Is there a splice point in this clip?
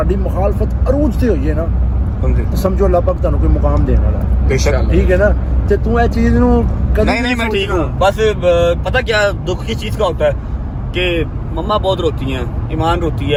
no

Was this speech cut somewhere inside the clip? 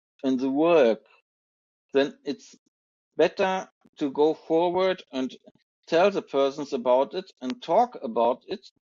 no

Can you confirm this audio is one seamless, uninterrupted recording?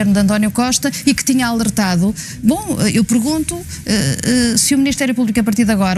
yes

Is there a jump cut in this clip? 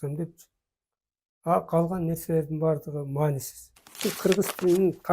yes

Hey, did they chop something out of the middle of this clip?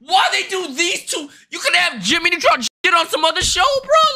no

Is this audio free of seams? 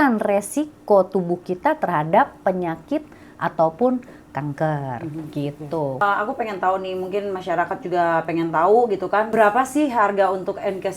no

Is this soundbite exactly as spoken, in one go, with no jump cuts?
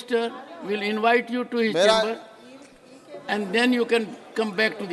yes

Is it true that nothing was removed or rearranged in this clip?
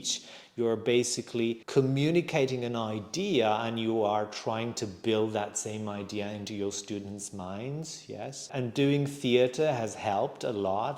no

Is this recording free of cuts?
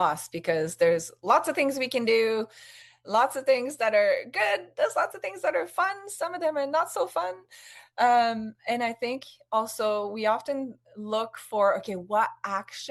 yes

